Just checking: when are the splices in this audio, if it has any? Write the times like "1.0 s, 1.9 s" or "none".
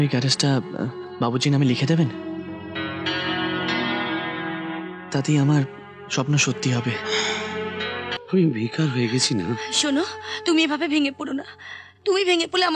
8.1 s